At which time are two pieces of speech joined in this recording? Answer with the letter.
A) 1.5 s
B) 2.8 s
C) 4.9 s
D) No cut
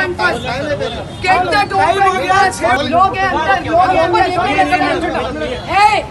B